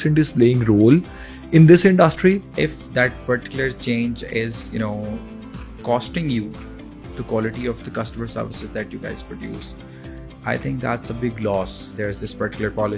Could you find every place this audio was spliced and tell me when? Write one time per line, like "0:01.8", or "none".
0:02.5
0:11.9